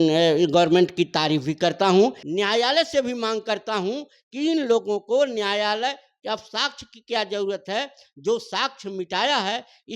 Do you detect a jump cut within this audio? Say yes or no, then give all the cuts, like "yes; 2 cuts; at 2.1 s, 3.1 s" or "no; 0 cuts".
yes; 1 cut; at 2.2 s